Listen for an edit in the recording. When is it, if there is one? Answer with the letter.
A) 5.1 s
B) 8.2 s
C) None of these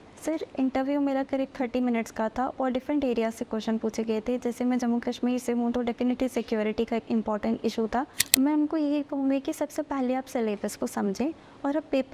B